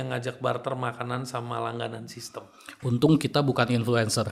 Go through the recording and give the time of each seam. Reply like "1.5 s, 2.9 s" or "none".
none